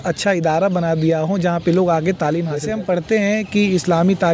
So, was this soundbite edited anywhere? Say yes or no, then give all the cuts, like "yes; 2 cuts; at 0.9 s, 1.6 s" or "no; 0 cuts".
yes; 1 cut; at 2.6 s